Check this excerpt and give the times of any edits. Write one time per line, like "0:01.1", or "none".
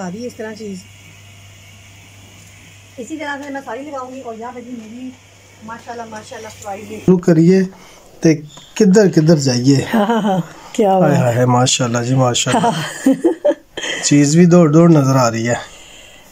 0:07.1